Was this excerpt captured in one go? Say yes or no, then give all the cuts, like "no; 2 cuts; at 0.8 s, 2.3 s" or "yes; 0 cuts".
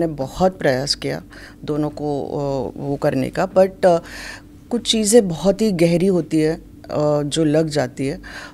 yes; 0 cuts